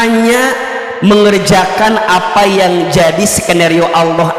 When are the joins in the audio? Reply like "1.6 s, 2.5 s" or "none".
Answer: none

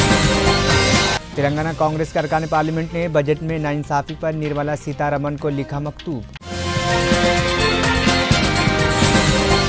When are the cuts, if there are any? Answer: 1.0 s

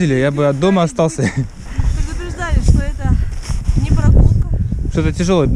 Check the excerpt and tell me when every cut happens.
1.6 s

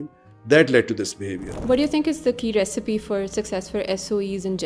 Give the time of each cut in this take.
1.6 s

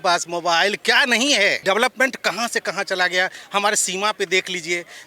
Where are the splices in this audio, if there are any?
1.6 s

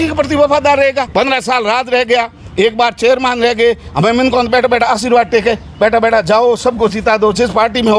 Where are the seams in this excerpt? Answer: 1.1 s

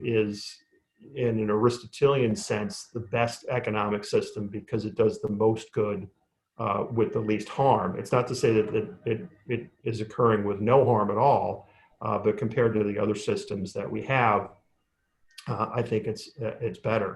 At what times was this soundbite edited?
none

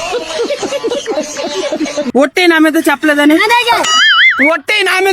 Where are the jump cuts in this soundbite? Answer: 2.1 s

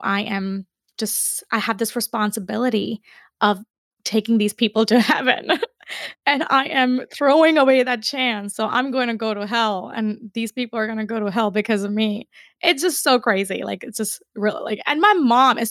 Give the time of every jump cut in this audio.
none

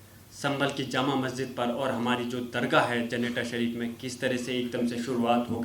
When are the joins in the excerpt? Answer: none

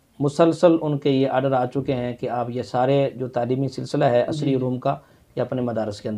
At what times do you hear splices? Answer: none

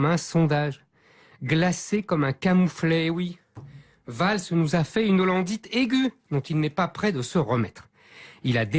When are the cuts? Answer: 3.8 s

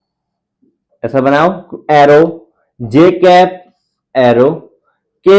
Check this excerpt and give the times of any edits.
none

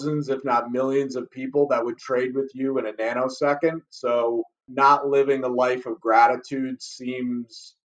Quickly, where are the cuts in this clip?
4.6 s

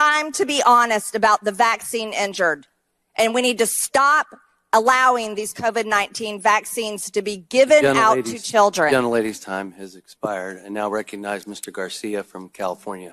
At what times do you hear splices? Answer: none

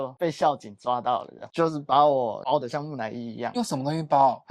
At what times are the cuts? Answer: 1.4 s

